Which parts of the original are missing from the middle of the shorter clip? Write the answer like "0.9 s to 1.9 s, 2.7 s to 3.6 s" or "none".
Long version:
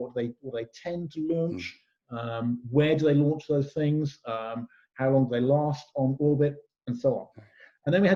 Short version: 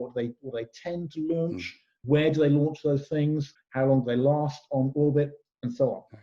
2.0 s to 2.6 s, 4.2 s to 4.8 s